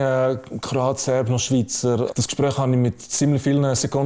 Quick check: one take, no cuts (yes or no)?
no